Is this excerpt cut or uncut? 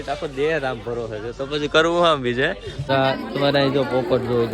cut